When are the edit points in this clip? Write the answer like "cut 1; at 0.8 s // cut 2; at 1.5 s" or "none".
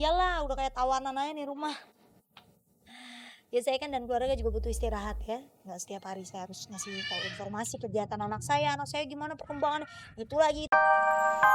cut 1; at 10.6 s